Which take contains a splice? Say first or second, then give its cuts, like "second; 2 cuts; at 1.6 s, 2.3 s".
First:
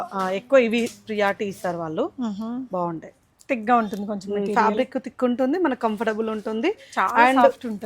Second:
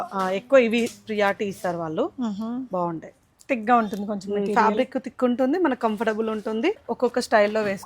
second; 1 cut; at 6.9 s